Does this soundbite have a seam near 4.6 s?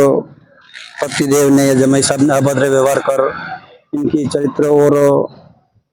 no; 0 cuts

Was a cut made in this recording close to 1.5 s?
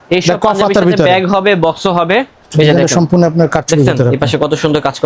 no; 0 cuts

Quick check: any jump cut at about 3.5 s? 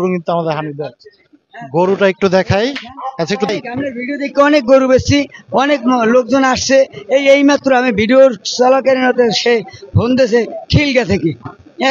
yes; 1 cut; at 3.5 s

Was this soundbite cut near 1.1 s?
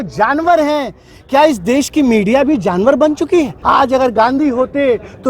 no; 1 cut; at 3.6 s

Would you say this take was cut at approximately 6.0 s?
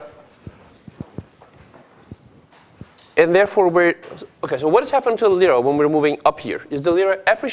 yes; 1 cut; at 6.0 s

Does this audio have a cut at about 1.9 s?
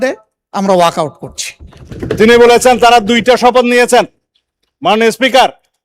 yes; 1 cut; at 1.9 s

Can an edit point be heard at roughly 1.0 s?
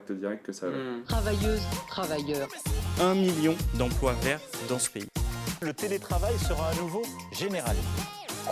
yes; 1 cut; at 1.0 s

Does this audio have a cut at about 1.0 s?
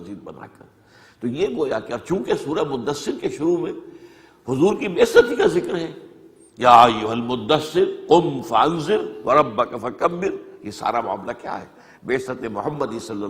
no; 0 cuts

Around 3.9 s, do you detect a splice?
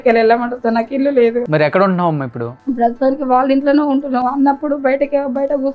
no; 2 cuts; at 1.4 s, 2.5 s

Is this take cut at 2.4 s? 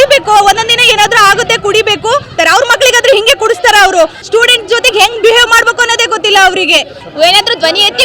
yes; 3 cuts; at 2.4 s, 4.2 s, 7.0 s

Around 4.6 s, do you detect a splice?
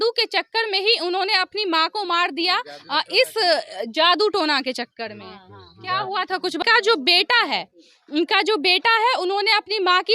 no; 1 cut; at 6.6 s

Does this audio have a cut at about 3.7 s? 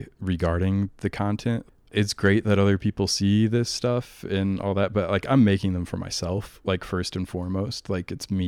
no; 1 cut; at 1.9 s

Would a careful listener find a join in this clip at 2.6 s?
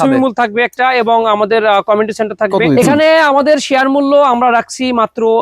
yes; 1 cut; at 2.6 s

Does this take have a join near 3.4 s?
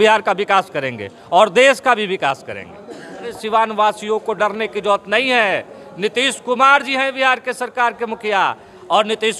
yes; 1 cut; at 3.4 s

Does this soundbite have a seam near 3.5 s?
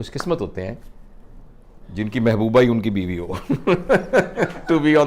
no; 0 cuts

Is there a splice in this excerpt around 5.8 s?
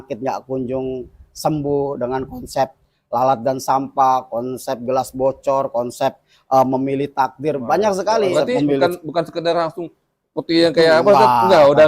no; 1 cut; at 8.3 s

